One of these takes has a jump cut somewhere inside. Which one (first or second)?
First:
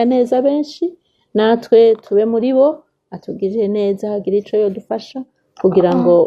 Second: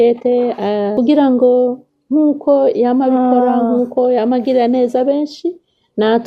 second